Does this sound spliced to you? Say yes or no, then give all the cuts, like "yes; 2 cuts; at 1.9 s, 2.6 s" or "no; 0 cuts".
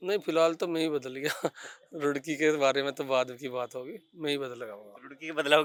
no; 0 cuts